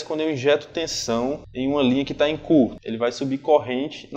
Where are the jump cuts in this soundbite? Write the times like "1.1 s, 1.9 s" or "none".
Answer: 1.5 s, 2.8 s

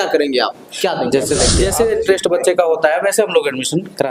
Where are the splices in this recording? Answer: 1.5 s

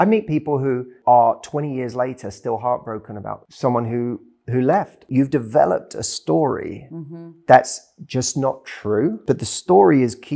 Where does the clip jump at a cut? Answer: 0.9 s, 3.5 s, 5.1 s, 9.2 s

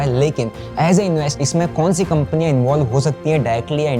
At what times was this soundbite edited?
1.4 s

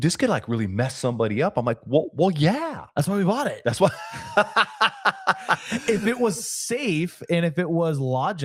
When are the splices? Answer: none

